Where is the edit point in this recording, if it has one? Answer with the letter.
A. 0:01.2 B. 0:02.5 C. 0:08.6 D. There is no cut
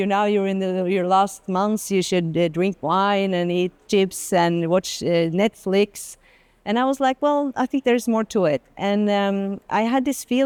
D